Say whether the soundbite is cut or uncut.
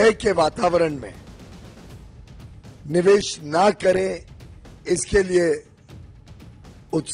uncut